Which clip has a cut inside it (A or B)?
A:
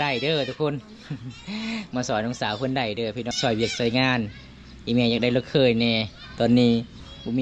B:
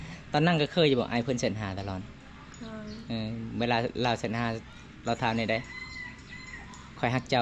A